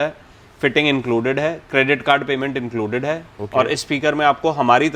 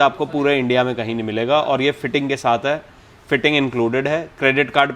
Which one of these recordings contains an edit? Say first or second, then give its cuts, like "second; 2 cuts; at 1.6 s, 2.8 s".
first; 1 cut; at 3.3 s